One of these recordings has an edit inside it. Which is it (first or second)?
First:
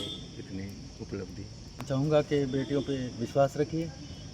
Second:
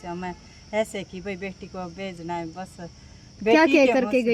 first